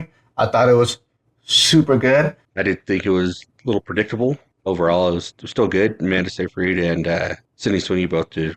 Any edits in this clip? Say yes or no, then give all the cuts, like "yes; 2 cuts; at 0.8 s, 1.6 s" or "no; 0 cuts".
yes; 3 cuts; at 2.4 s, 4.5 s, 7.4 s